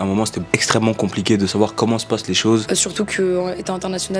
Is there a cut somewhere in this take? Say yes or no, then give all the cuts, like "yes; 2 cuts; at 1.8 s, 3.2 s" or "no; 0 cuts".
yes; 1 cut; at 2.6 s